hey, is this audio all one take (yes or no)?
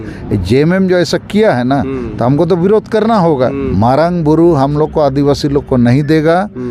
no